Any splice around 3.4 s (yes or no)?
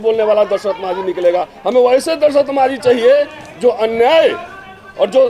no